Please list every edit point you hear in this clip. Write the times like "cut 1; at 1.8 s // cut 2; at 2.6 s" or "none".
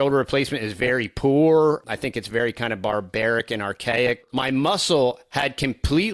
cut 1; at 1.8 s // cut 2; at 4.3 s